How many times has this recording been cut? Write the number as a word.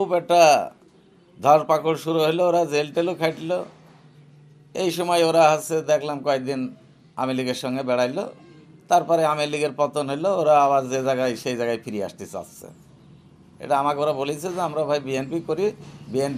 zero